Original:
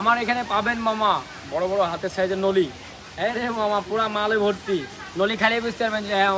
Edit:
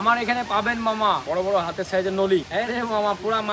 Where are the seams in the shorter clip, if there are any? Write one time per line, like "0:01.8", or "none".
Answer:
0:01.2
0:02.5

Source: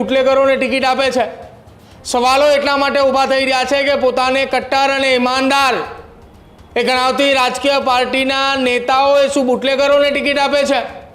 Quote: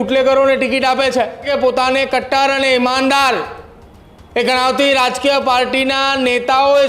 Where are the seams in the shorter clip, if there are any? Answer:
0:01.5

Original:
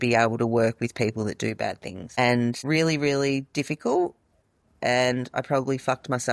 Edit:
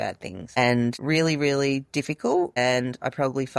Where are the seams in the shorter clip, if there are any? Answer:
0:02.5

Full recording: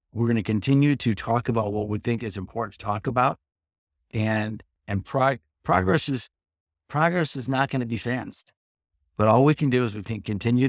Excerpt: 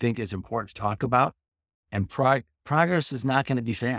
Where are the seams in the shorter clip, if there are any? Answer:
0:02.0

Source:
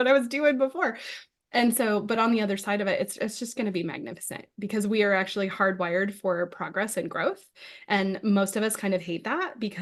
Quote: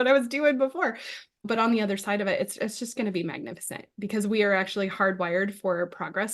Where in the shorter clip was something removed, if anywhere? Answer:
0:01.5

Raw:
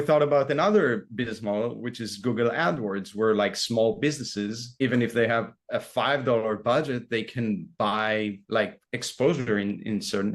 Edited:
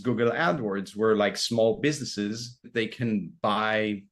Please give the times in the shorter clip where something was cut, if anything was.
0:02.6

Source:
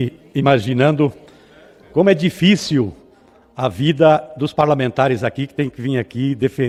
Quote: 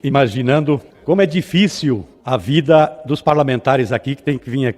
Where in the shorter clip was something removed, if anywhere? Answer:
0:00.9
0:02.1

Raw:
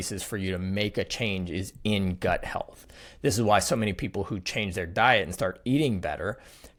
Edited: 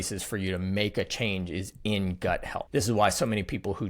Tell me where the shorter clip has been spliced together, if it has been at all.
0:02.6

